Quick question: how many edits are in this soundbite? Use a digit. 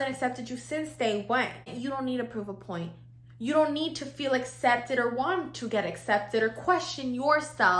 1